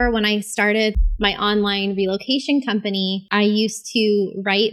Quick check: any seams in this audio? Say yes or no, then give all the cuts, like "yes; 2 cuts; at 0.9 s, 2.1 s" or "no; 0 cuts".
yes; 2 cuts; at 1.0 s, 3.2 s